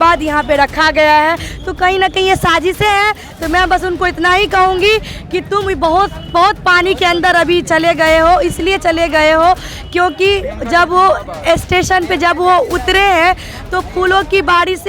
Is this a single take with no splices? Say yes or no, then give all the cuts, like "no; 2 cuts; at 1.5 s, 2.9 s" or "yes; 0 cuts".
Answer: yes; 0 cuts